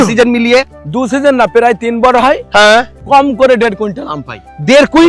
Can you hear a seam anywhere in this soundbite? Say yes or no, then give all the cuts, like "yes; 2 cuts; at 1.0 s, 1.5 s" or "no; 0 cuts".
yes; 1 cut; at 2.9 s